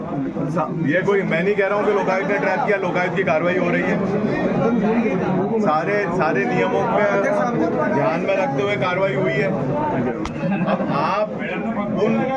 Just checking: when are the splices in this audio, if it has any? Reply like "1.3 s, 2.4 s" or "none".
none